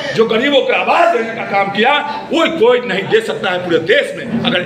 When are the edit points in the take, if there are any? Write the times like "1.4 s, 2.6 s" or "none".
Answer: none

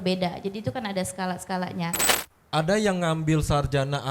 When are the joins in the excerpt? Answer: 2.0 s

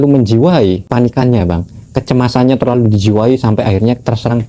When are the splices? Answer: none

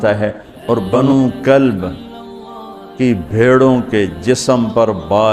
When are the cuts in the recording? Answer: 0.9 s

